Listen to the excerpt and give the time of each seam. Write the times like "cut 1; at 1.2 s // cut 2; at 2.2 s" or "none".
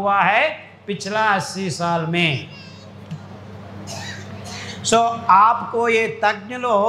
none